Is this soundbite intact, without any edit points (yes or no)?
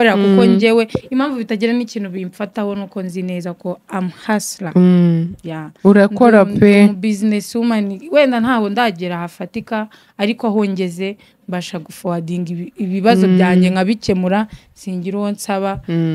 yes